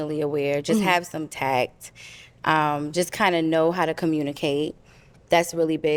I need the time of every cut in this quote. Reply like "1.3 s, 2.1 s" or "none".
none